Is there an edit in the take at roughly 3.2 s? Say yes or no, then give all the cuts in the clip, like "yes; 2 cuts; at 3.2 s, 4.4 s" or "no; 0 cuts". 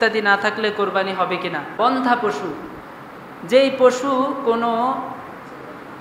no; 1 cut; at 1.7 s